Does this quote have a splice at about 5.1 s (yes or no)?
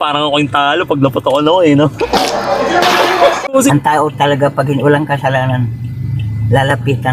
no